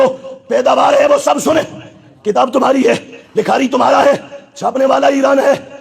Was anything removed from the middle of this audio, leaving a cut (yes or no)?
no